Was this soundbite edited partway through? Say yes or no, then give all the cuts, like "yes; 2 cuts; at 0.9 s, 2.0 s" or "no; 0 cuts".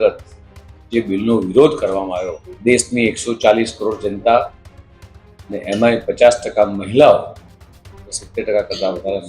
yes; 1 cut; at 2.4 s